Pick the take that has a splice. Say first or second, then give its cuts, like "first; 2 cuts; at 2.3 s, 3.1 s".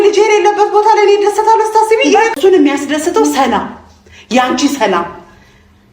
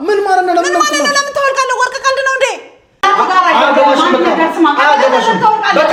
first; 1 cut; at 2.3 s